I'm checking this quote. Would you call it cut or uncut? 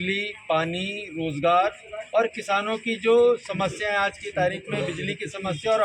uncut